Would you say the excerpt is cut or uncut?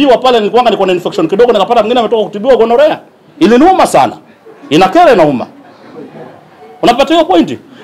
uncut